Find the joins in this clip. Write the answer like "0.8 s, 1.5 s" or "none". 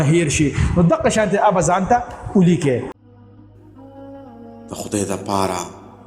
2.9 s